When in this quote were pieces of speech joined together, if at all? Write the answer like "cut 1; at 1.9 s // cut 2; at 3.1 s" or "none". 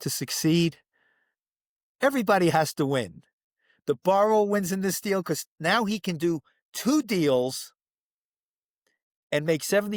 none